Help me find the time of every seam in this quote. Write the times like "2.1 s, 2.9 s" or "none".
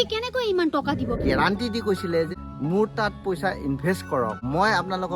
1.2 s, 2.3 s, 4.4 s